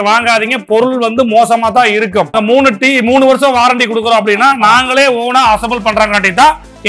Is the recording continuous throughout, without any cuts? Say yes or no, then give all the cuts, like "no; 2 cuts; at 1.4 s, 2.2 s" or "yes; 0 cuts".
no; 1 cut; at 2.3 s